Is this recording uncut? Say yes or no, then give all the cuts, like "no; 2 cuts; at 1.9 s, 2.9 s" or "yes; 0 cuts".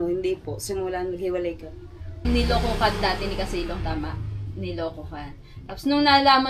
no; 1 cut; at 2.2 s